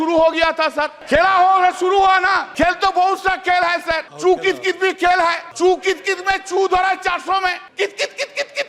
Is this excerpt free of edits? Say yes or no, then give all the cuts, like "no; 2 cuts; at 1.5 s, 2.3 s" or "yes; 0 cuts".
no; 5 cuts; at 1.0 s, 2.5 s, 4.1 s, 5.4 s, 7.6 s